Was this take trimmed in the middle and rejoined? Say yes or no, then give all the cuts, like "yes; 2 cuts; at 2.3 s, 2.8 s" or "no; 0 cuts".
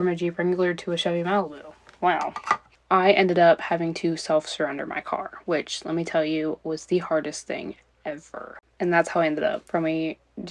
yes; 2 cuts; at 2.8 s, 8.6 s